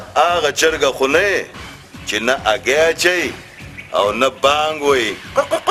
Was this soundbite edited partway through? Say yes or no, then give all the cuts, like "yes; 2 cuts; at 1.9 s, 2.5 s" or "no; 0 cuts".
no; 0 cuts